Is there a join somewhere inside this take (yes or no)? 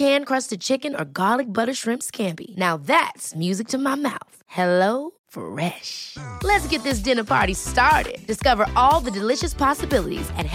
no